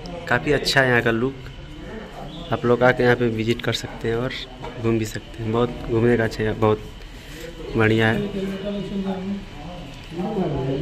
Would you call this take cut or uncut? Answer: uncut